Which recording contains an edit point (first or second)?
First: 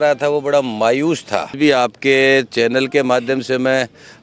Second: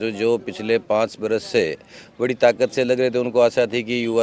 first